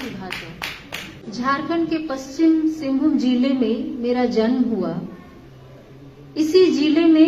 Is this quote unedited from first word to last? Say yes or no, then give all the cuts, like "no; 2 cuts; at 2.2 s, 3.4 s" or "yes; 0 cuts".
no; 1 cut; at 1.2 s